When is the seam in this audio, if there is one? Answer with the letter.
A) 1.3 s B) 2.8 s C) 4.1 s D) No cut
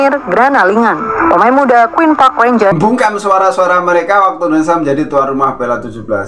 B